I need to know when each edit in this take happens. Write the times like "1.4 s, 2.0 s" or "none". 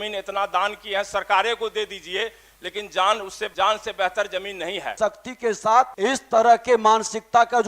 3.4 s, 4.9 s, 5.9 s